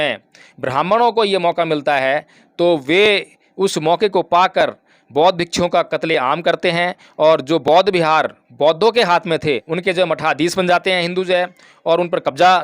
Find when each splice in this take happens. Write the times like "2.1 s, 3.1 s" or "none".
9.7 s

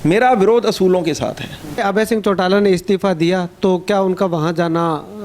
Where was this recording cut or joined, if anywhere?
1.8 s

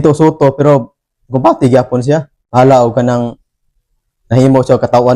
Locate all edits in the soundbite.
2.4 s

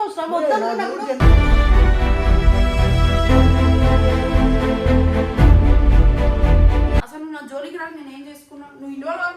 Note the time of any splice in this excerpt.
7.0 s

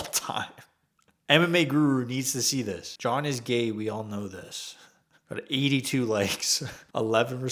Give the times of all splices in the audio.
none

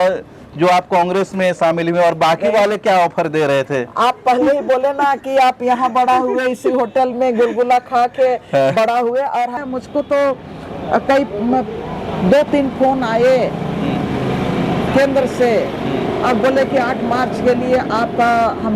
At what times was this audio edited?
9.6 s

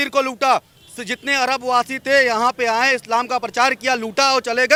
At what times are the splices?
none

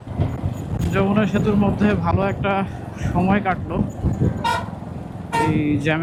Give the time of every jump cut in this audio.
none

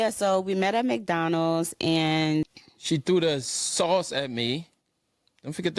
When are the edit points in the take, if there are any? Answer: 2.6 s

